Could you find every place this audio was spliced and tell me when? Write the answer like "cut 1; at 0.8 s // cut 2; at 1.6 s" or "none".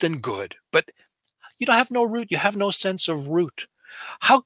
none